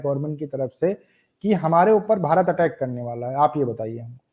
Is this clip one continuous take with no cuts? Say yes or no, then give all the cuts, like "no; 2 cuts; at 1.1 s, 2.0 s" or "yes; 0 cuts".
yes; 0 cuts